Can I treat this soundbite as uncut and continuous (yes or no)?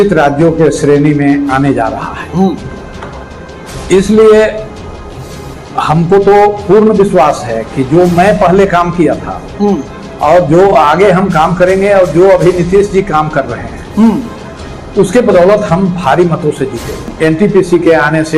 no